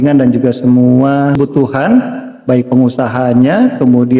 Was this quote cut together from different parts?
yes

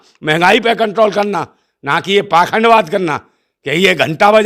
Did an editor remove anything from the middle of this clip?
no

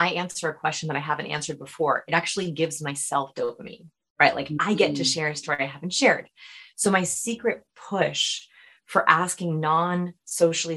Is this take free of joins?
yes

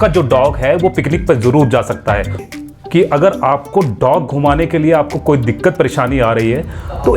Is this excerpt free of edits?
no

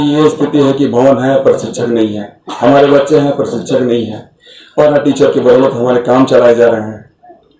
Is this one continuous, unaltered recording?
yes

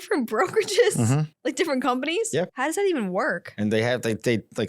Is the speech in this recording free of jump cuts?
no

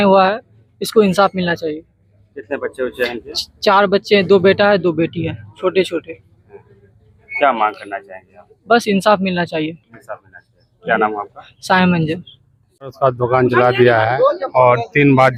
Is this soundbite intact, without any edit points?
yes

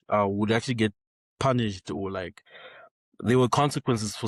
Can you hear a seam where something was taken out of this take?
no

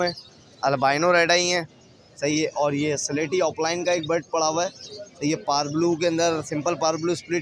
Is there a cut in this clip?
no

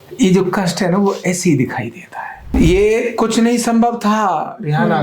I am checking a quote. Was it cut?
yes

